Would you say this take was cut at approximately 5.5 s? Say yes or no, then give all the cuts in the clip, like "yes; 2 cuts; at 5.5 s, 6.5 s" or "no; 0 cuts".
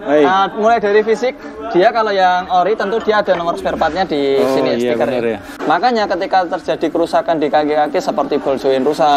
yes; 1 cut; at 5.5 s